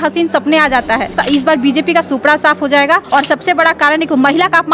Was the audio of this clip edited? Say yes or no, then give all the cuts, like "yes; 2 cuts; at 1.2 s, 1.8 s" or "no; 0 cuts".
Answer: yes; 2 cuts; at 1.1 s, 3.0 s